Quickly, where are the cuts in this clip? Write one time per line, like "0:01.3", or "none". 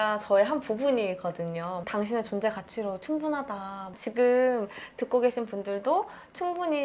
0:03.9